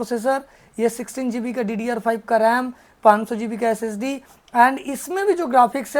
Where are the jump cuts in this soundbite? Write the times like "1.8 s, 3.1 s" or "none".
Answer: none